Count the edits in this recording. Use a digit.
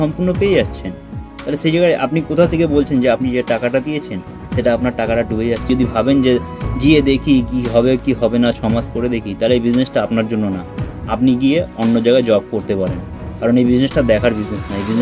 1